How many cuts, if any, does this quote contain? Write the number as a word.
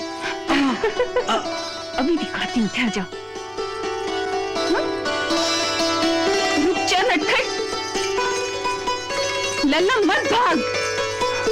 zero